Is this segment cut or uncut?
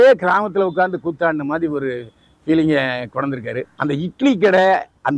cut